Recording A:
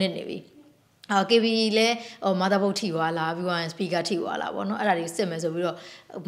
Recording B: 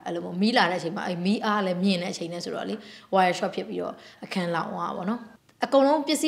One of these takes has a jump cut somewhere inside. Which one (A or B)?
B